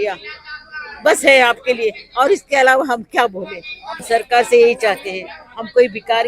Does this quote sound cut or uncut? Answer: cut